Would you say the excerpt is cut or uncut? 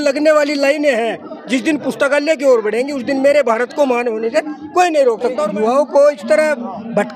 cut